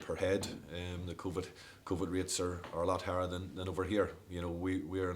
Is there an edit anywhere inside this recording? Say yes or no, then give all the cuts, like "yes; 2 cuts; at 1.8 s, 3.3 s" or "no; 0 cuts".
no; 0 cuts